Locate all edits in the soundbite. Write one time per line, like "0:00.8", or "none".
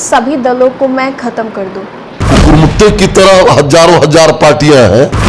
0:02.2